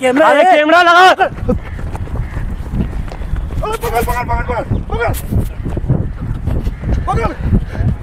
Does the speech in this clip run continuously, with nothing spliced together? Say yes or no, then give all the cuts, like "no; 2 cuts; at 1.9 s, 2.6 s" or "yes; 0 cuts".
yes; 0 cuts